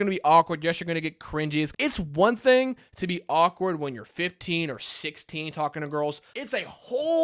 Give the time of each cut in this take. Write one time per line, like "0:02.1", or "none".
0:01.7
0:06.3